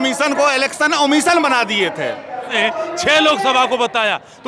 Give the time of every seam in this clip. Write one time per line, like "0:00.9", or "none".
0:02.6